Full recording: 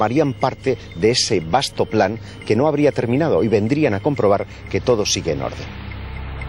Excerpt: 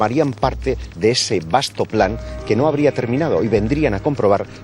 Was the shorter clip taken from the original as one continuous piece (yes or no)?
yes